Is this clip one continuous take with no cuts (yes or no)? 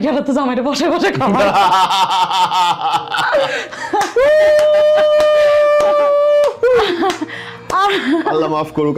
yes